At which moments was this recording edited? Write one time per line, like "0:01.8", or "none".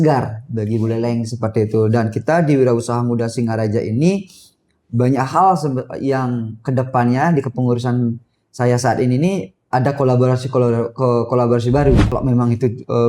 0:12.1